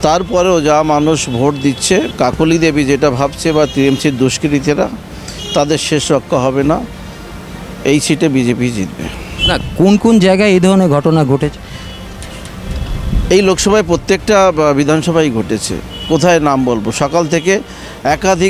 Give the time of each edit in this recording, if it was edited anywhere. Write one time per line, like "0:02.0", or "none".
0:02.1